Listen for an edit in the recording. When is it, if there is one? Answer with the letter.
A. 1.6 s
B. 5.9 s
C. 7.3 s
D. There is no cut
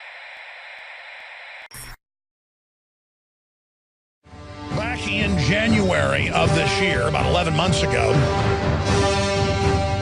A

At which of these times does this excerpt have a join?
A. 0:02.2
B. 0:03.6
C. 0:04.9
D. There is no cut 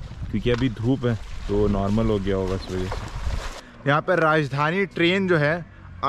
B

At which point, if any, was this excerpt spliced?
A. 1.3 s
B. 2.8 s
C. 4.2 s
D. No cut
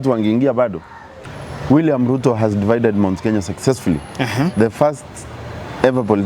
A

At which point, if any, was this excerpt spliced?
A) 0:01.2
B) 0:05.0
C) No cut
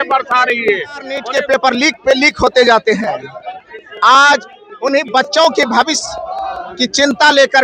A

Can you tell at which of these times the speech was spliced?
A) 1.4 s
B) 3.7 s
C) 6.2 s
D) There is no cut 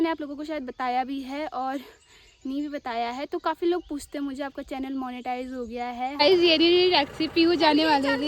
C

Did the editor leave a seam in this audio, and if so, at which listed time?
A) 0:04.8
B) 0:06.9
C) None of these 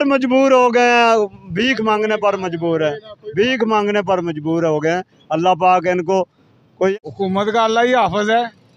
B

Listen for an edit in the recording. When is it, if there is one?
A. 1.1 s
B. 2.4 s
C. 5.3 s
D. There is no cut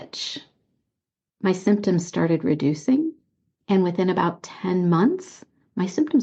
D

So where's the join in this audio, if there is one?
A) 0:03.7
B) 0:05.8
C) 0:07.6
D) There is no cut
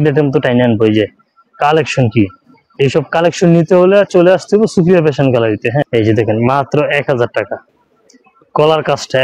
B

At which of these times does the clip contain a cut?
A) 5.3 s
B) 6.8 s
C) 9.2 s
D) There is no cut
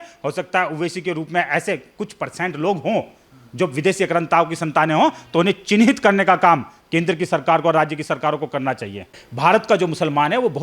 C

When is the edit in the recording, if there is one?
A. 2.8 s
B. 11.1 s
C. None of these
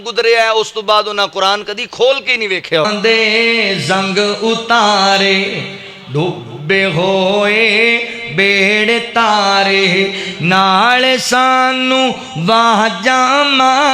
A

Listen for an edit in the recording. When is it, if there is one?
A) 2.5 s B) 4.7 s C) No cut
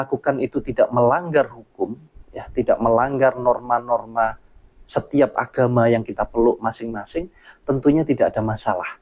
C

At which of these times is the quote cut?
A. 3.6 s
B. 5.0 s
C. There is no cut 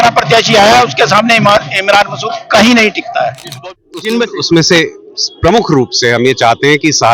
A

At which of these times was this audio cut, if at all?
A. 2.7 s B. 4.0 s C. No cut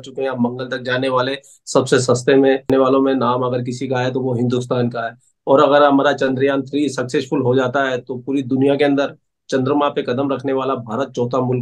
A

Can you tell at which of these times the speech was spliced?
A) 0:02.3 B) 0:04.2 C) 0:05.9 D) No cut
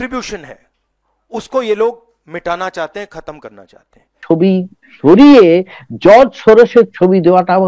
B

